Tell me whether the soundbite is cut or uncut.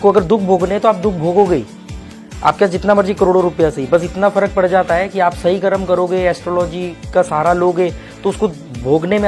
uncut